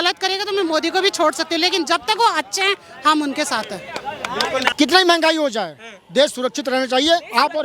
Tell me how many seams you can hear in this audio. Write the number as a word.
one